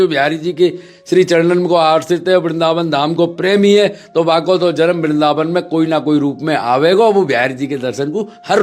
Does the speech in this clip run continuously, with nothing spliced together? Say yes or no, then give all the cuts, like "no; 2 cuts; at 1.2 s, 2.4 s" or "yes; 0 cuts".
yes; 0 cuts